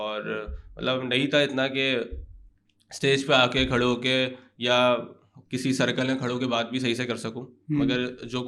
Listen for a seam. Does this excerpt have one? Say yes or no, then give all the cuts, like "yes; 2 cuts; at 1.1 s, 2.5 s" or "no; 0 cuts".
no; 0 cuts